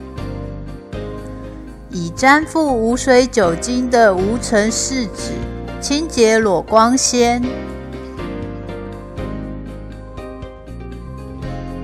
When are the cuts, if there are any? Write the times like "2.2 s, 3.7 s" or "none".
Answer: 1.8 s, 7.5 s